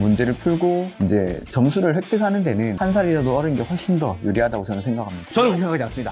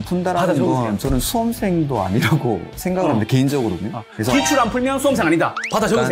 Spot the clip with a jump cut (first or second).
first